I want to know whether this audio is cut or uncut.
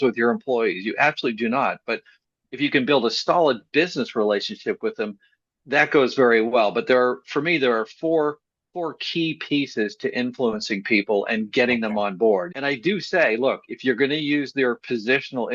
cut